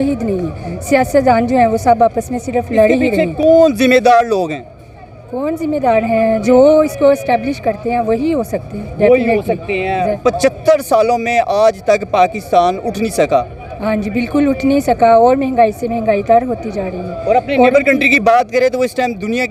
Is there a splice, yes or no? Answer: no